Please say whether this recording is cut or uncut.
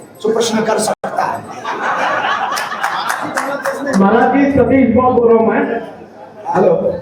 uncut